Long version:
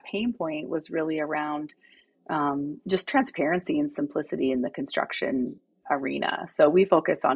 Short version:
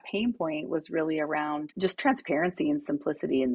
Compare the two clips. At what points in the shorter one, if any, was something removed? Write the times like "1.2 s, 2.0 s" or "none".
1.7 s